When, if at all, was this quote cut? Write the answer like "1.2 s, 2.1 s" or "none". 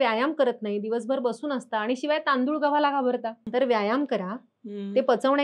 3.4 s